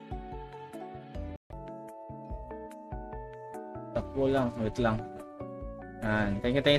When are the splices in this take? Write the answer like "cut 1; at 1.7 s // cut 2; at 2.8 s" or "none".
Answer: cut 1; at 1.4 s